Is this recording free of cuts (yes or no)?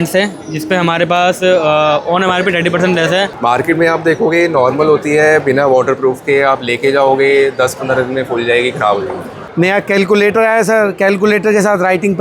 no